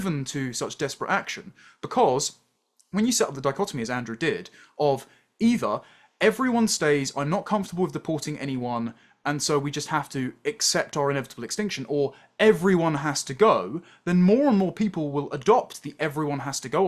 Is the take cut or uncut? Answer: uncut